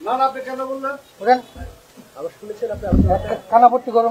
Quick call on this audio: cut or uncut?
cut